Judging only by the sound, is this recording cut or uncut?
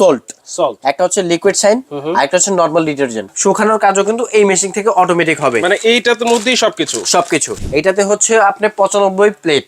cut